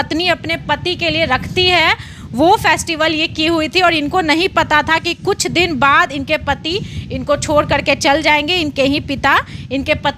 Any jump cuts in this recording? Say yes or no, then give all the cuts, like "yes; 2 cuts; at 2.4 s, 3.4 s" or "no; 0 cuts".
no; 0 cuts